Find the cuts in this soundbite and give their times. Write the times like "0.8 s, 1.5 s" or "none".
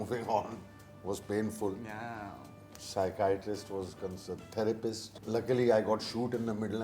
5.1 s